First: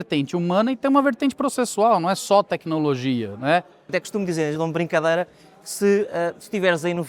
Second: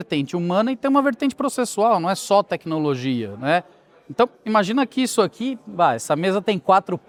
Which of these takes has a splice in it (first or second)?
first